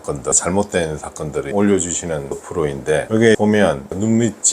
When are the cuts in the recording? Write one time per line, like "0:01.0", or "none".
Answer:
0:03.5